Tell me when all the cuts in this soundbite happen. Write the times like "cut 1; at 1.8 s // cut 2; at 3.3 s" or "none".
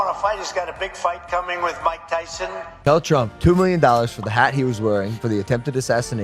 cut 1; at 2.7 s